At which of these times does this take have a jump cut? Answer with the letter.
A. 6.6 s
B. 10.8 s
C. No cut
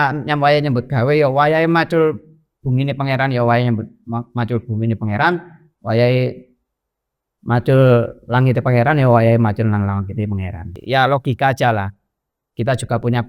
B